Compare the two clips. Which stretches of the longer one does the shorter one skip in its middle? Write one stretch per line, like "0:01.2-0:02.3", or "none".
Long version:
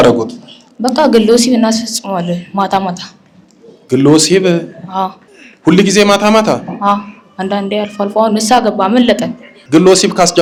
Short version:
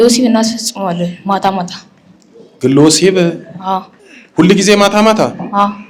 none